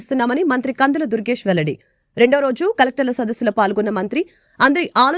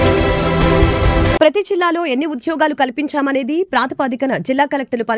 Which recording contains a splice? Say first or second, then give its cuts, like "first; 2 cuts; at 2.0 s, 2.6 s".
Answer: second; 1 cut; at 1.4 s